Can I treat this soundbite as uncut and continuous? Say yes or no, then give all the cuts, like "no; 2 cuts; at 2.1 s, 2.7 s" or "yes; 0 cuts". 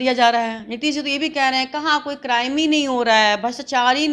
yes; 0 cuts